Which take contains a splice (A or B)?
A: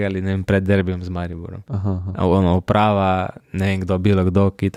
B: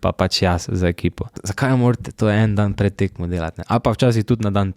B